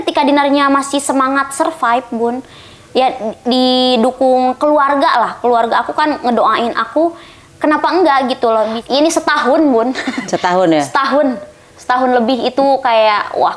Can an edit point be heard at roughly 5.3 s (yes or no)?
no